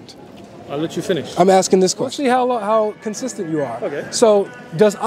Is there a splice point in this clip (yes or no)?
yes